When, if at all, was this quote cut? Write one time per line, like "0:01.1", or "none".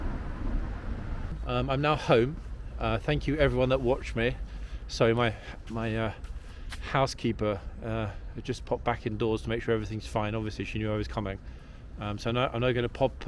0:01.4